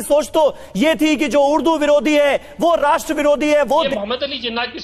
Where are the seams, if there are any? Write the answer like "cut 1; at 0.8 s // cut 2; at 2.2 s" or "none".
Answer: cut 1; at 3.9 s

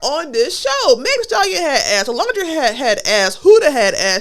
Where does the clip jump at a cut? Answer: none

